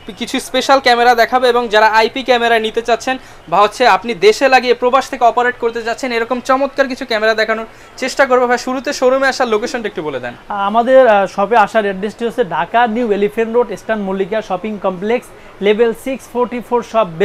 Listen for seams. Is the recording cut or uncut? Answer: uncut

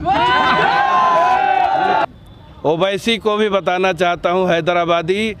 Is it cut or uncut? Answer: cut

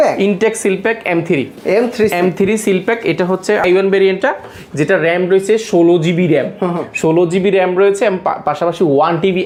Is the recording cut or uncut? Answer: uncut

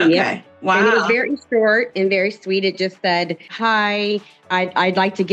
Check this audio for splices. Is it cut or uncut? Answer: uncut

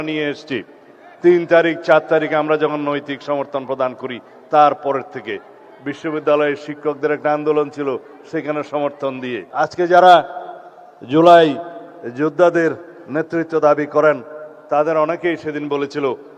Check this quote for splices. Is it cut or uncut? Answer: cut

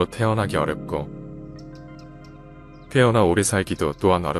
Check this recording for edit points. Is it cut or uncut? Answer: uncut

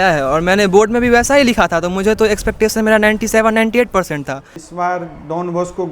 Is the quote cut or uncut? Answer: cut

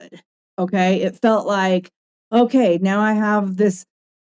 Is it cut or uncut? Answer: uncut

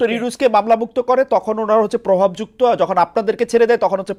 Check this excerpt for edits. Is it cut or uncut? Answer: uncut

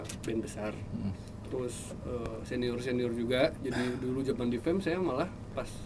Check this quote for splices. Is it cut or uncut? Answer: uncut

